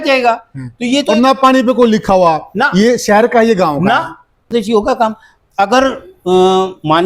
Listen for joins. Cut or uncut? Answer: cut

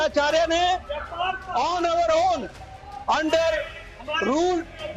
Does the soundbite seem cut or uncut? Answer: uncut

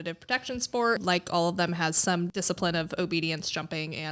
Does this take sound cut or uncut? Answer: cut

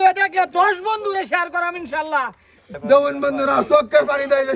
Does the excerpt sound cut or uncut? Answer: cut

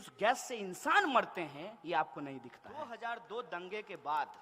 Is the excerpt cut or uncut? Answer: cut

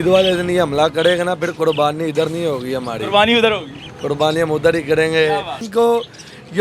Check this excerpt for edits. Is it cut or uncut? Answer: cut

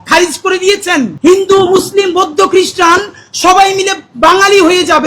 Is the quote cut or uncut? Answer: cut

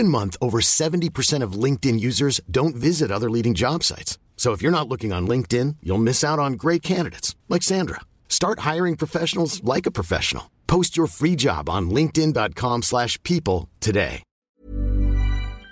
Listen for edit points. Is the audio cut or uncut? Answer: cut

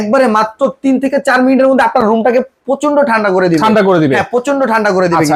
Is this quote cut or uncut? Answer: uncut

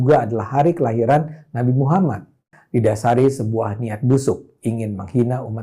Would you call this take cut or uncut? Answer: cut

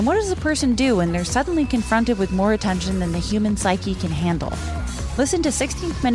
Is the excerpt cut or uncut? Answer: uncut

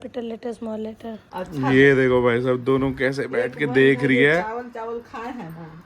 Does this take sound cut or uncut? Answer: cut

